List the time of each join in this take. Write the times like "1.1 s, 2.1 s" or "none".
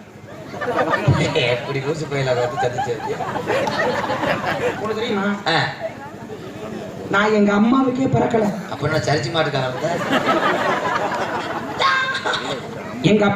4.9 s